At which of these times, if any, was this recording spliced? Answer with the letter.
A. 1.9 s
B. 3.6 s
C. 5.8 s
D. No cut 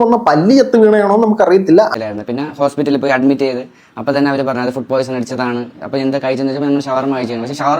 A